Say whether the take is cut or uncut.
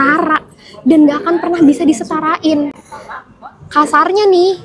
uncut